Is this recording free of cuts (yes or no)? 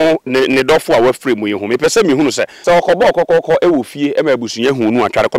no